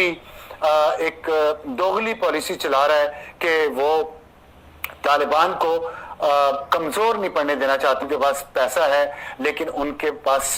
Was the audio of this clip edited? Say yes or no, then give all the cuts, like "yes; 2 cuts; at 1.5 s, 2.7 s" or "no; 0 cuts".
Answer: yes; 1 cut; at 8.0 s